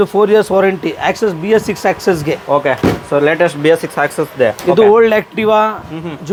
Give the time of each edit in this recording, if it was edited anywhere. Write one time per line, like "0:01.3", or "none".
none